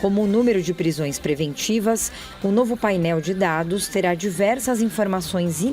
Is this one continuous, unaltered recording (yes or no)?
no